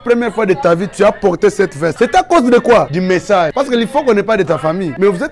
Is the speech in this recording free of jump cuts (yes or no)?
yes